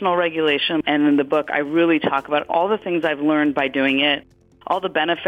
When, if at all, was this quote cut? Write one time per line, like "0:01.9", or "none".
0:00.8
0:02.5